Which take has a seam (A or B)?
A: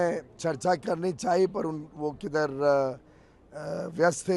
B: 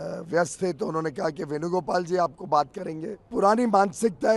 B